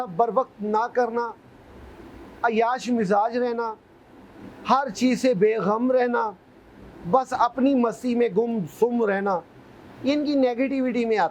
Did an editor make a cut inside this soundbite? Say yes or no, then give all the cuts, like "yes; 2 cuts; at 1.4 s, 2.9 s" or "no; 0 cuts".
no; 0 cuts